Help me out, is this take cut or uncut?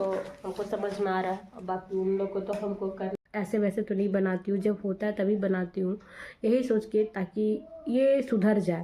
cut